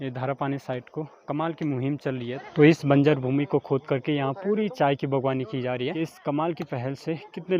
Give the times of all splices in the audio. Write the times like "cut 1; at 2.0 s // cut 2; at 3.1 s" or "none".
cut 1; at 2.4 s // cut 2; at 5.9 s